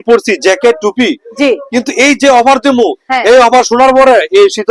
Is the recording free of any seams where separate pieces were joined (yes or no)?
yes